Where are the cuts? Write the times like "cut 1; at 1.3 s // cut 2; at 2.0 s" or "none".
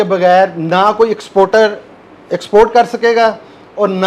none